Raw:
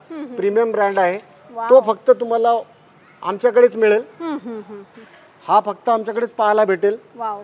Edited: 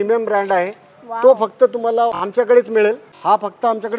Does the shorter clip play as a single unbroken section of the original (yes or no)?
no